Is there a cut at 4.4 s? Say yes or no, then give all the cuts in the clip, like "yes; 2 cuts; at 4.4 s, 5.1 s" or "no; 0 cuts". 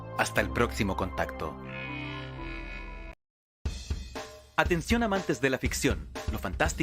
no; 1 cut; at 3.2 s